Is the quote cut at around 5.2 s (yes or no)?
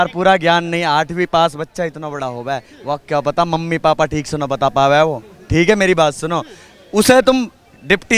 no